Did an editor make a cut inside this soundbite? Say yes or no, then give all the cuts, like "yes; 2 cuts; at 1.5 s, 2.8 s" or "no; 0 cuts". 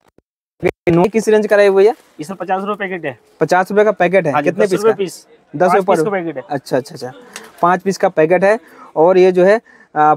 no; 0 cuts